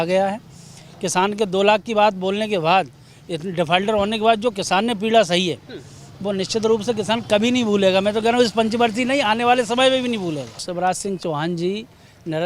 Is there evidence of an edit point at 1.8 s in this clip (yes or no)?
no